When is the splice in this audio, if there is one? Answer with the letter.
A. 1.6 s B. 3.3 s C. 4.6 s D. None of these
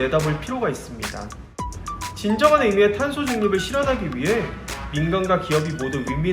A